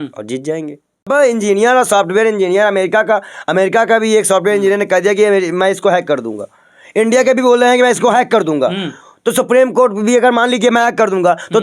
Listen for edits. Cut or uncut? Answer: cut